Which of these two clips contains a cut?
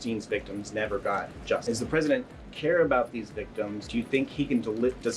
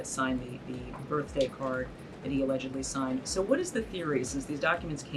first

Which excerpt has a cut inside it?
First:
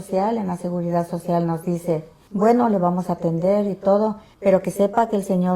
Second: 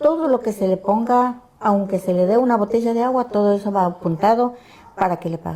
first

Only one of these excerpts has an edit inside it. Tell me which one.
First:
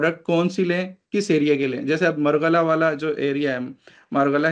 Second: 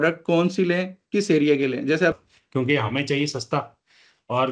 second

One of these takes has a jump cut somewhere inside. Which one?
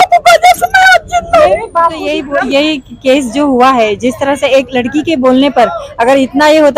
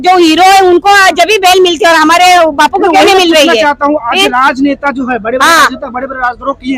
first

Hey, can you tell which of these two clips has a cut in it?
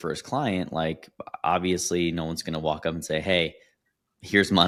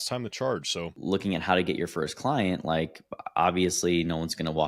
second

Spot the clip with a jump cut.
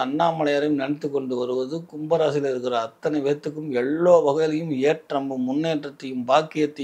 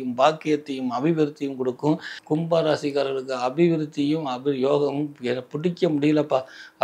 second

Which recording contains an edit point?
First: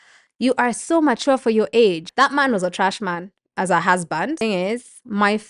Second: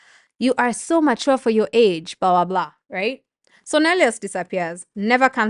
first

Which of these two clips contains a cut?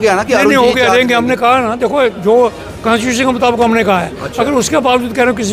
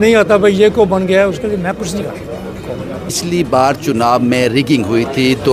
second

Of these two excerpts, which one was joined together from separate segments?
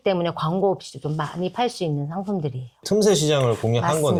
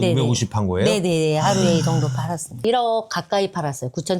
second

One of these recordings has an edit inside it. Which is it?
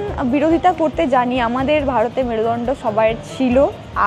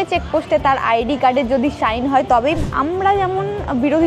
second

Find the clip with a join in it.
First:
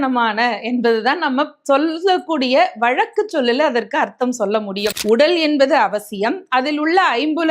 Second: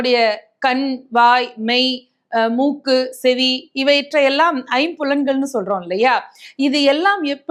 first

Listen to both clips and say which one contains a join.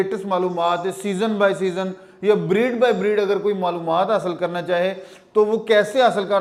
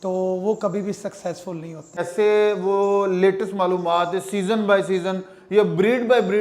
second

